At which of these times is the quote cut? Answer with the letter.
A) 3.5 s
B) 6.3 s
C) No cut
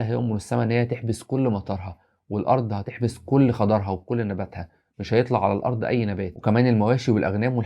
B